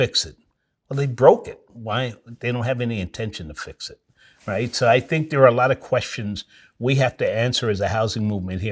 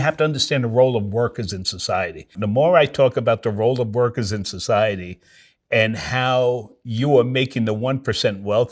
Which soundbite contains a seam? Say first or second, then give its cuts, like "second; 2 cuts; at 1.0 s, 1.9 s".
second; 1 cut; at 2.4 s